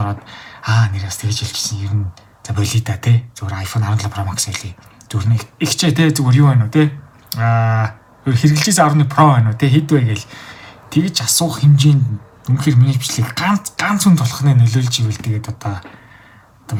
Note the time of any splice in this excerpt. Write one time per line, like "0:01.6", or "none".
none